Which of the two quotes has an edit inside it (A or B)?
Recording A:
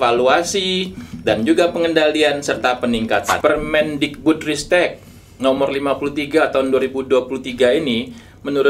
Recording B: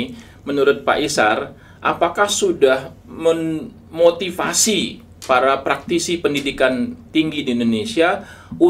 A